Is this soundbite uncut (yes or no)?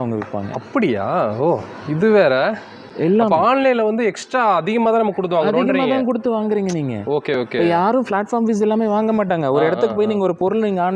yes